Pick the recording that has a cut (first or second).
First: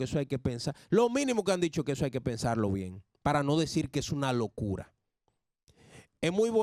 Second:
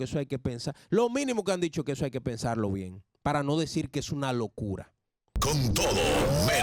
second